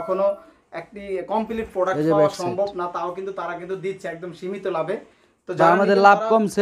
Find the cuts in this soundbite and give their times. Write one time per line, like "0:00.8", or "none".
none